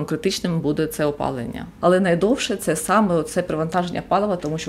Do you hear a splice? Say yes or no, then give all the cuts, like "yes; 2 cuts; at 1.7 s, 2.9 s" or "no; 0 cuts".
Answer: yes; 1 cut; at 1.6 s